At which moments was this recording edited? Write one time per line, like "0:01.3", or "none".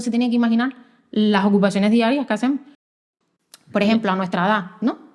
0:02.8